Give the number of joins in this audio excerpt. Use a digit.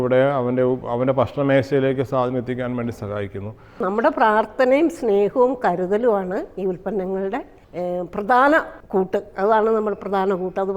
3